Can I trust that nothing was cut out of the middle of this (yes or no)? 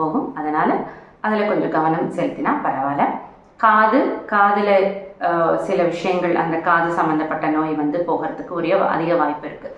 yes